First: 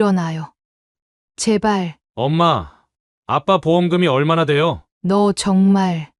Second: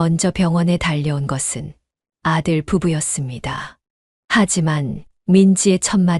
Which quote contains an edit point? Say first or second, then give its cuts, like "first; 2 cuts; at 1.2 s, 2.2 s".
first; 1 cut; at 2.0 s